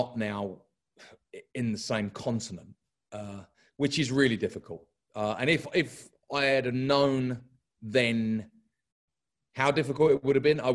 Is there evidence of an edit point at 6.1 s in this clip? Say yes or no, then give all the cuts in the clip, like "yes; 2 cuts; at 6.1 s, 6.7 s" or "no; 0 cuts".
no; 0 cuts